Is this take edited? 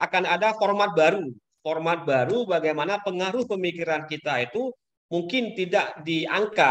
no; 0 cuts

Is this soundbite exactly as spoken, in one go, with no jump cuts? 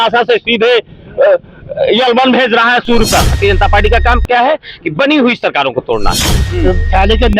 no; 2 cuts; at 3.3 s, 6.4 s

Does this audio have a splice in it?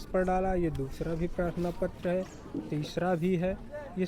no; 0 cuts

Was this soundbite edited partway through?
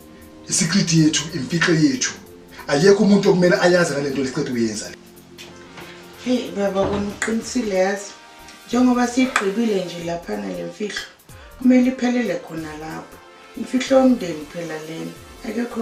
no; 0 cuts

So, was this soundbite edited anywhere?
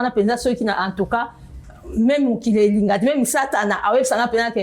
no; 0 cuts

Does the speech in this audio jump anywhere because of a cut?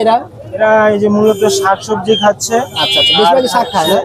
no; 0 cuts

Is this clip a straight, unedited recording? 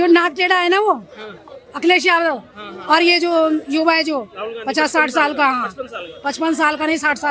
yes; 0 cuts

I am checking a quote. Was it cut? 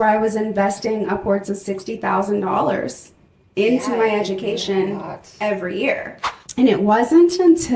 no; 0 cuts

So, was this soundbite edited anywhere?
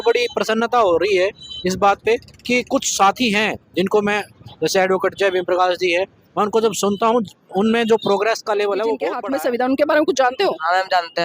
yes; 1 cut; at 9.1 s

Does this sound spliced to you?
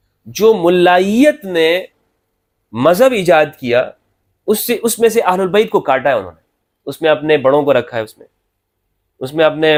no; 0 cuts

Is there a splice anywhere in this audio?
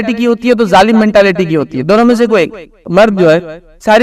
yes; 1 cut; at 2.9 s

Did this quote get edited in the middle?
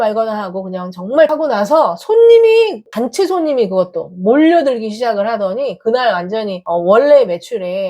yes; 3 cuts; at 1.3 s, 2.8 s, 6.6 s

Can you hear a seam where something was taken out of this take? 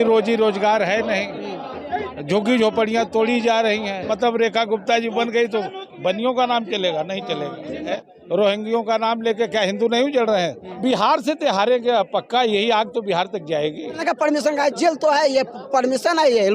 yes; 4 cuts; at 4.1 s, 7.9 s, 10.8 s, 14.0 s

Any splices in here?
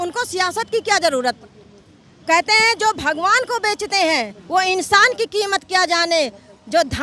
yes; 1 cut; at 1.4 s

